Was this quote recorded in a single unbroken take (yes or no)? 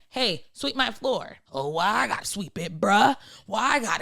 no